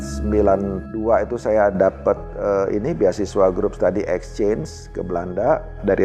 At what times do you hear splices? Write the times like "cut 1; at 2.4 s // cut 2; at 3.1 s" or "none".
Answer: none